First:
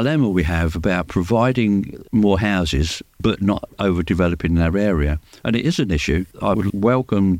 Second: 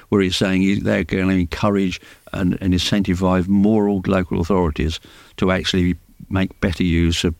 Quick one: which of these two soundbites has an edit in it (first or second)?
first